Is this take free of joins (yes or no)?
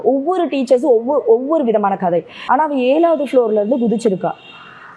no